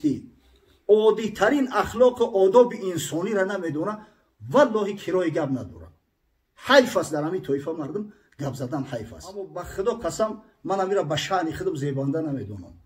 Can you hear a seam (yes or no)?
yes